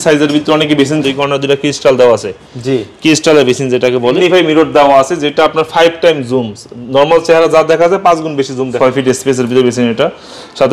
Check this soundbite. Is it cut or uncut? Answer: cut